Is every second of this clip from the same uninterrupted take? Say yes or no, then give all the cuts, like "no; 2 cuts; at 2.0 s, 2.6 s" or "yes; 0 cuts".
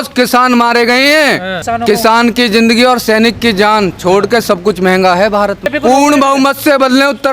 no; 2 cuts; at 1.6 s, 5.7 s